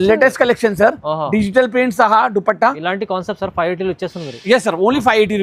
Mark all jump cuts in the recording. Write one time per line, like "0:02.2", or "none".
none